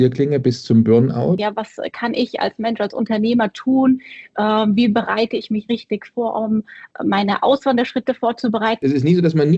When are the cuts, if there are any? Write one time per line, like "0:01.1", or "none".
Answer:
0:01.4
0:08.8